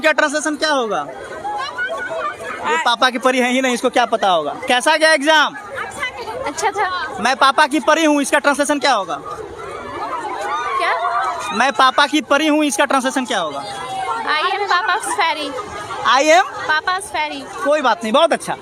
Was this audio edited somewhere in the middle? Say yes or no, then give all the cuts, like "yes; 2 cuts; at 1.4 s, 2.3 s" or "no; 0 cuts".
no; 0 cuts